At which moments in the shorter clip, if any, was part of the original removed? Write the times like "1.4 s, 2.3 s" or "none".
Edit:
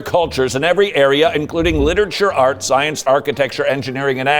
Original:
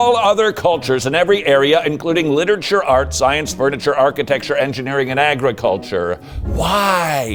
3.0 s